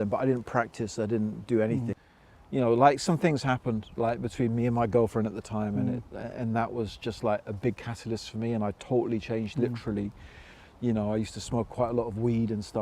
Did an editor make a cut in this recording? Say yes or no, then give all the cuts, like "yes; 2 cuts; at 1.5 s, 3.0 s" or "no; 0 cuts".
yes; 1 cut; at 1.9 s